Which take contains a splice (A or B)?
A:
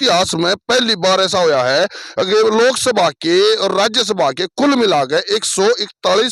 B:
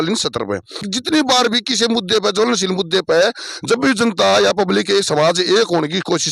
B